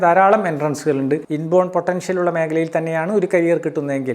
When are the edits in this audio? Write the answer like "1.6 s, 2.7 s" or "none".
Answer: 1.3 s